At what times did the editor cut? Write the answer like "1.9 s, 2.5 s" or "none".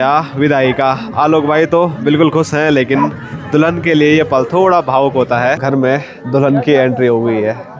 5.6 s

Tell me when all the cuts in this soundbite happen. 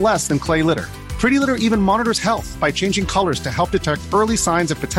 none

